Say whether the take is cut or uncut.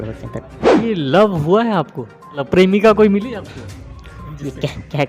cut